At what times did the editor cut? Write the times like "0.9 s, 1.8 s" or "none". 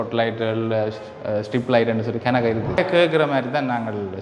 2.8 s